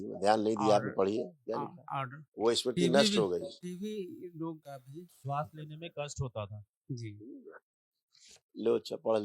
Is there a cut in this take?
yes; 2 cuts; at 3.6 s, 4.8 s

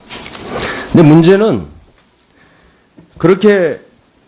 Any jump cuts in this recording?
no; 0 cuts

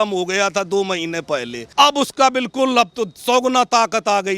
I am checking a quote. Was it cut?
yes; 1 cut; at 1.6 s

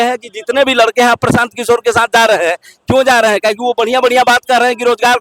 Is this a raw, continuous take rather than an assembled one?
yes; 0 cuts

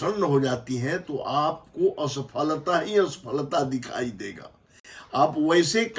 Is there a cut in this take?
no; 0 cuts

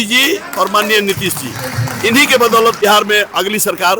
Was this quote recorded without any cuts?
no; 1 cut; at 2.8 s

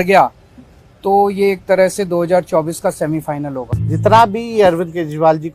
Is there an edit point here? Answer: yes; 1 cut; at 3.7 s

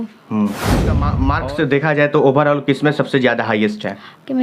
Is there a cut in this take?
yes; 1 cut; at 1.2 s

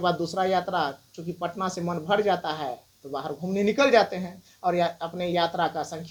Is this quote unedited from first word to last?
yes; 0 cuts

